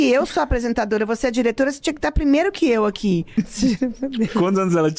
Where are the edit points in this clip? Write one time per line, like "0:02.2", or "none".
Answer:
0:03.4